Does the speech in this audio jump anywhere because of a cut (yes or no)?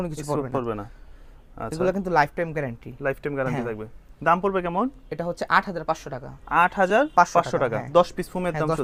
no